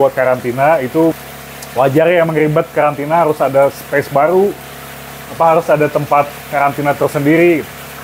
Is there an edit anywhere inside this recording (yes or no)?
yes